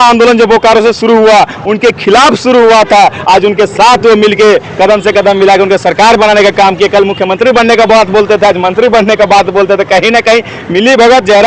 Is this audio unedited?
yes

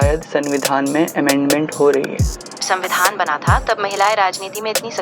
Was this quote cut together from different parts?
yes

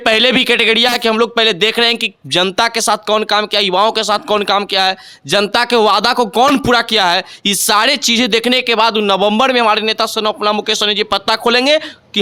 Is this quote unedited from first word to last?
yes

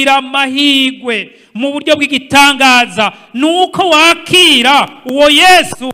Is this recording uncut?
yes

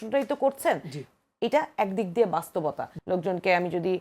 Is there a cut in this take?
yes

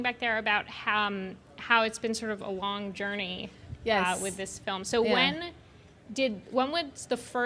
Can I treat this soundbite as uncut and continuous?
yes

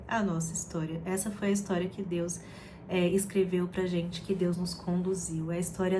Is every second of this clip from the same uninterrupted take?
yes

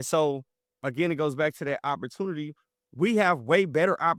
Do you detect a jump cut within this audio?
no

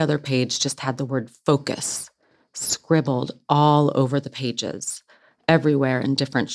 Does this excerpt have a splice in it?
no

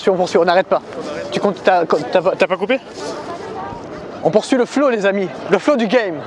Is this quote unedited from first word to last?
yes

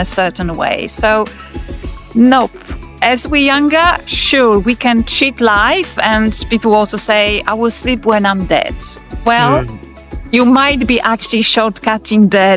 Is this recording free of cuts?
yes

